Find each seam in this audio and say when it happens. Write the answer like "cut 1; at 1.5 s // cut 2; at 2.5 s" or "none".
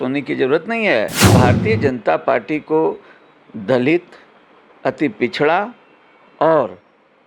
cut 1; at 1.3 s

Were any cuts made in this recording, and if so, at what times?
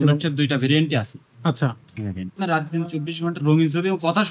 cut 1; at 2.4 s

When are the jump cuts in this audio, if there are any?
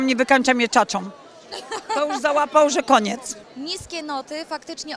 cut 1; at 3.4 s

